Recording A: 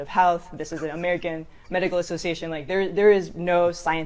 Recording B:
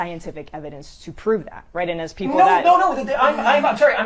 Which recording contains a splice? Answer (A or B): B